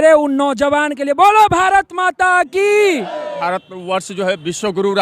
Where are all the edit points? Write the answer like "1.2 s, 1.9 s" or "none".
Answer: 3.3 s

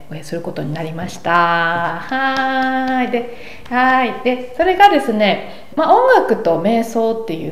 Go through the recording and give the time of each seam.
5.6 s

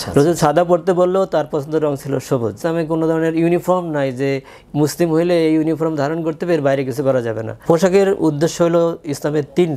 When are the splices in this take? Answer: 2.6 s, 7.6 s

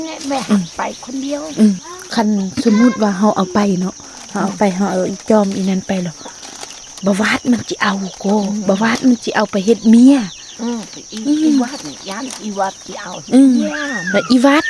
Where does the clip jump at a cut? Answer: 1.9 s

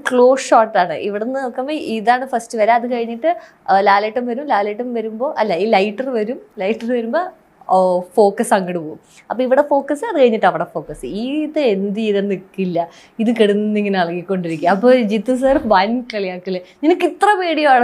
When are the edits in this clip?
none

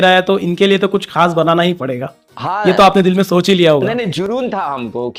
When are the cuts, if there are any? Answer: none

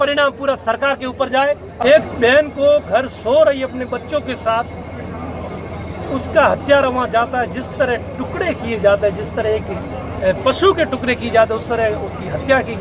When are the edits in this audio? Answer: 1.7 s

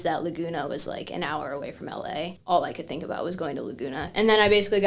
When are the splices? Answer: 2.4 s, 4.1 s

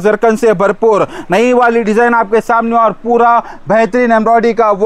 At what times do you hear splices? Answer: none

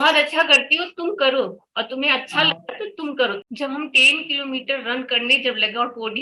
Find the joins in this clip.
3.4 s

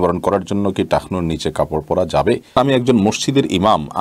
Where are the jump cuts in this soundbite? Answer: 2.5 s

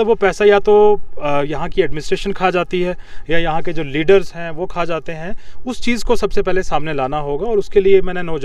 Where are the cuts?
none

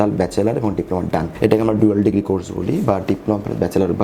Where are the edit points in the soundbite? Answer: 1.3 s

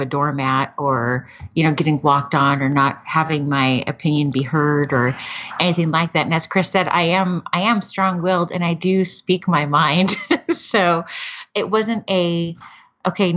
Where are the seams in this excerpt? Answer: none

